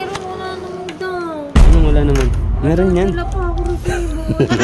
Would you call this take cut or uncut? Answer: uncut